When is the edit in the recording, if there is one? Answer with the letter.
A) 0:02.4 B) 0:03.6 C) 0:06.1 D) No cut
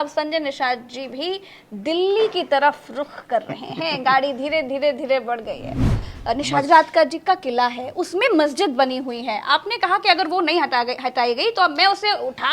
C